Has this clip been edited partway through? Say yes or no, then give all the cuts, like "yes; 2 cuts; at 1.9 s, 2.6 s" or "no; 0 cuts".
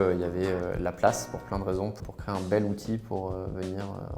yes; 1 cut; at 2.0 s